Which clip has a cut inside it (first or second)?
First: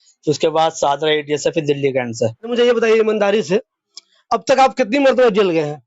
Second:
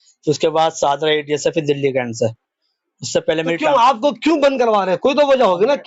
first